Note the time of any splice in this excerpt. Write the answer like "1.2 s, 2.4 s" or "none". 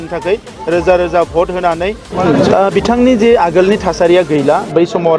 2.0 s